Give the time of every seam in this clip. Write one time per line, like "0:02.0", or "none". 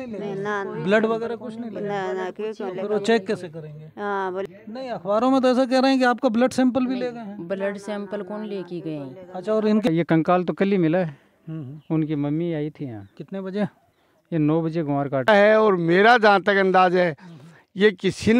0:04.5
0:09.9
0:15.3